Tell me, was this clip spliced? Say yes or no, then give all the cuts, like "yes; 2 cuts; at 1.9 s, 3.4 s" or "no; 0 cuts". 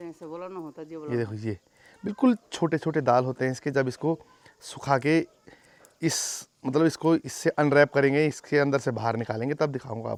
no; 0 cuts